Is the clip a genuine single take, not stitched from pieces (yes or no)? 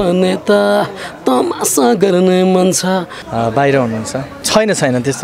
no